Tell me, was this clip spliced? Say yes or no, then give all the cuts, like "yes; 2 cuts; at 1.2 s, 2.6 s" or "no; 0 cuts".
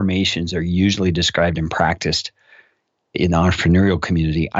no; 0 cuts